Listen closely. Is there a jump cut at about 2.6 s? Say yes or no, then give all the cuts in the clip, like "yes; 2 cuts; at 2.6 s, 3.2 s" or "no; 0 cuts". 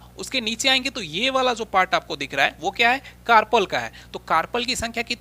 no; 0 cuts